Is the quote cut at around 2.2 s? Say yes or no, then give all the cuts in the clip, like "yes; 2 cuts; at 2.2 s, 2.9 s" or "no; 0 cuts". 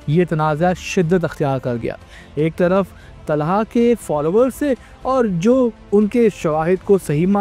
no; 0 cuts